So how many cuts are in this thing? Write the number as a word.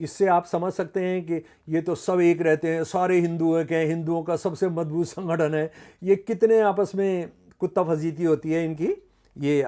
zero